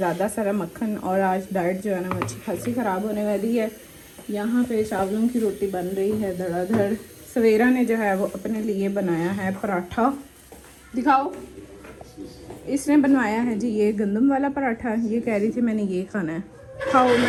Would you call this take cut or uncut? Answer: uncut